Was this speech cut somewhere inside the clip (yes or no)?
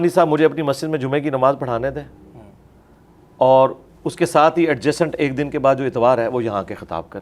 no